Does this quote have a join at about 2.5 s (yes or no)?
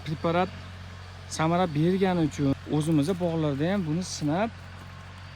yes